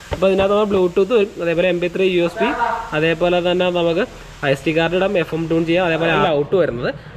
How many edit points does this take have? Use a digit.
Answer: 1